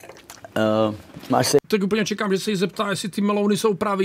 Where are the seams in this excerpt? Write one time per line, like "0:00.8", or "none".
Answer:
0:01.7

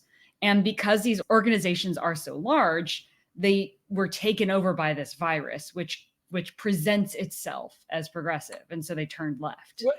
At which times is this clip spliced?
0:01.2

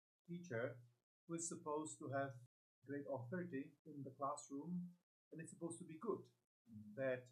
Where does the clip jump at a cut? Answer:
0:02.5
0:03.8

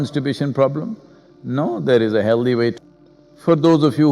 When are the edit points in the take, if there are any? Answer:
0:02.8

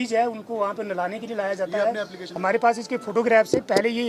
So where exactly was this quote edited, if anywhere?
0:02.3

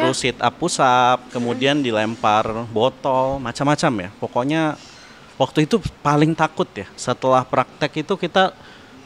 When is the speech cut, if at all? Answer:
none

